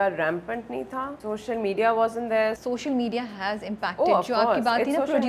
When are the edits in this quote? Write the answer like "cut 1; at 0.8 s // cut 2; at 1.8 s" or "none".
cut 1; at 1.2 s // cut 2; at 2.6 s